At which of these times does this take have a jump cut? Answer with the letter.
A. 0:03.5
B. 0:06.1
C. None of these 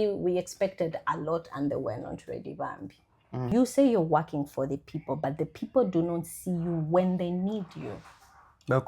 A